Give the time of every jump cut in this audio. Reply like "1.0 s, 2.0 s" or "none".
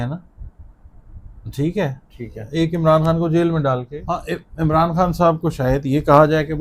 3.9 s